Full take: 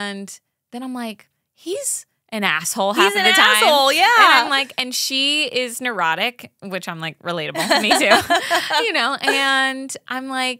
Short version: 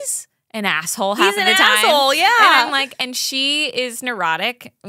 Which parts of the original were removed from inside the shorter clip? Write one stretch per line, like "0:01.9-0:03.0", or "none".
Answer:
none